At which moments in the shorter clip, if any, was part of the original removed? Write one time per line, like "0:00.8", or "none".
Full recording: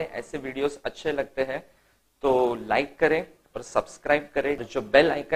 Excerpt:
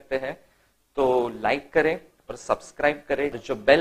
none